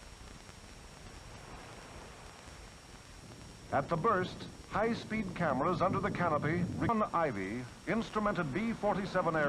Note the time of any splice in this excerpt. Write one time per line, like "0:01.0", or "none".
0:03.2
0:06.9

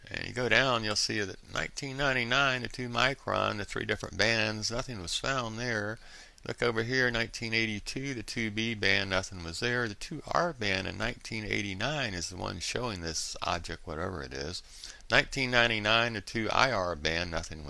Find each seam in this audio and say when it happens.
0:08.9

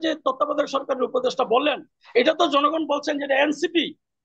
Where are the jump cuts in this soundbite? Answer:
none

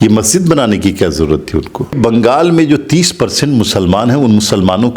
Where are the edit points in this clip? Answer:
0:01.8

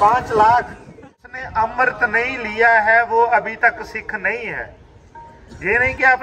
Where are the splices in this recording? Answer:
0:01.2

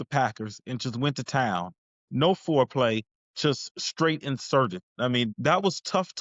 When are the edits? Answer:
0:05.3

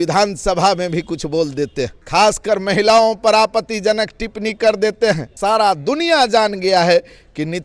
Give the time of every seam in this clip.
0:02.0
0:05.3

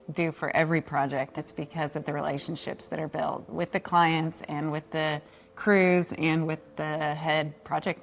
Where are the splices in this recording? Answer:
0:01.4

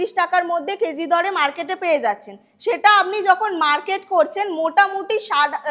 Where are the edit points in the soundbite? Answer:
none

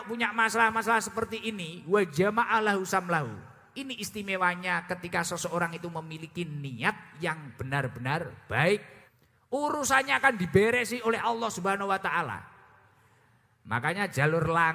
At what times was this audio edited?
0:09.0

